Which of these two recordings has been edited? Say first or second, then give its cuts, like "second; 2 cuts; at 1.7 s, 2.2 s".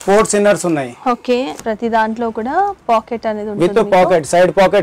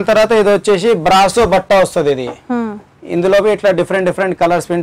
first; 1 cut; at 1.6 s